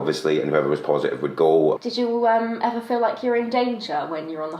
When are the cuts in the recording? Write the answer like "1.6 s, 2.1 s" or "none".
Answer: 1.8 s